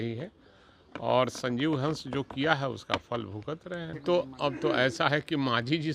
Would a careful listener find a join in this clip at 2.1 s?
no; 1 cut; at 4.0 s

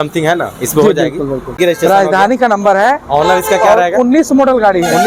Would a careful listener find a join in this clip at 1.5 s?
yes; 1 cut; at 1.5 s

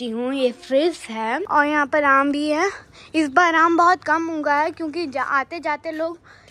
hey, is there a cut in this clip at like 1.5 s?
yes; 1 cut; at 1.5 s

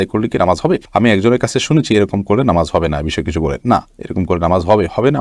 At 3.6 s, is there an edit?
no; 0 cuts

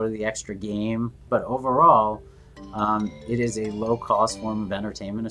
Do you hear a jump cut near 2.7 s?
no; 1 cut; at 1.2 s

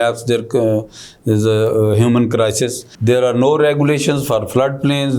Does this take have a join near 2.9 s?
yes; 1 cut; at 2.9 s

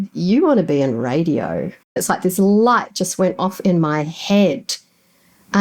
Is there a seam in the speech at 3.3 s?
no; 1 cut; at 2.0 s

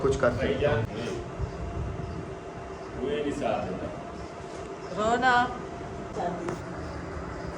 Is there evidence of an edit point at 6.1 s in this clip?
yes; 2 cuts; at 0.9 s, 6.1 s

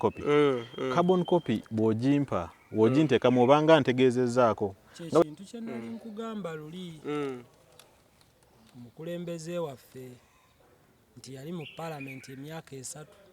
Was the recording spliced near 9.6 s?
no; 1 cut; at 5.2 s

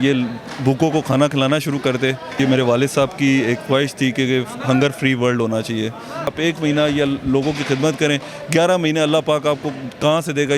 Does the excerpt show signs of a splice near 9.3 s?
no; 2 cuts; at 2.4 s, 6.3 s

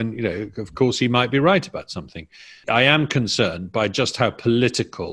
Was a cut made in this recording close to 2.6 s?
yes; 1 cut; at 2.6 s

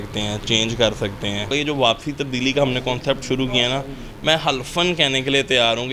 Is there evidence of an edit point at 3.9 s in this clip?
no; 1 cut; at 1.5 s

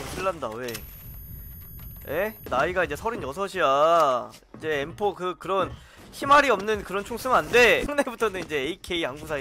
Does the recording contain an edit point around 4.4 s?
no; 2 cuts; at 2.4 s, 7.9 s

